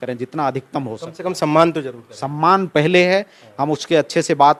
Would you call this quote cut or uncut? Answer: uncut